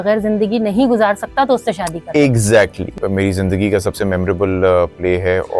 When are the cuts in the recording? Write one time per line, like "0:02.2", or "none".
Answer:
0:02.9